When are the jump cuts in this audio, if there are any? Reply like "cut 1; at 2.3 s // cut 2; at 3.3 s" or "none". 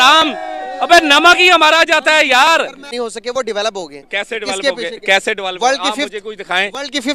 cut 1; at 2.9 s